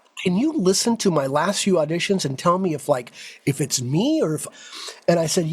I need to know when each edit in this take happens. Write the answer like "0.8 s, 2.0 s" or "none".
4.5 s